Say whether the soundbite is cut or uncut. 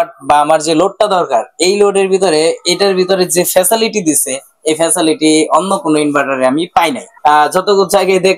cut